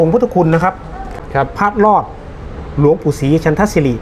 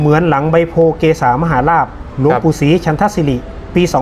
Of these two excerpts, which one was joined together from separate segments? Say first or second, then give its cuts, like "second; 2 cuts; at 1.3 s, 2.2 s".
first; 1 cut; at 1.2 s